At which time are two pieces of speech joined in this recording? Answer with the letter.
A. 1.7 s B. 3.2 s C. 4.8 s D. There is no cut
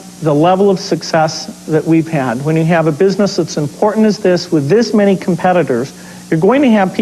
D